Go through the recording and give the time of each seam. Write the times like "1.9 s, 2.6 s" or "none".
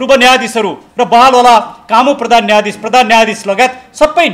none